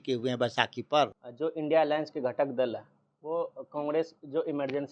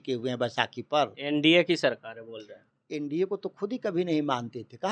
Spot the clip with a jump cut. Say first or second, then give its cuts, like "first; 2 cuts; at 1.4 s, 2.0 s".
first; 1 cut; at 1.2 s